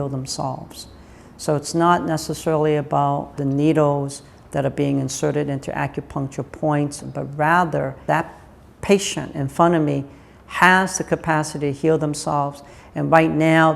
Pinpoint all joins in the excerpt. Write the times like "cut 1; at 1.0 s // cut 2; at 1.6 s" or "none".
cut 1; at 3.3 s // cut 2; at 7.0 s // cut 3; at 8.0 s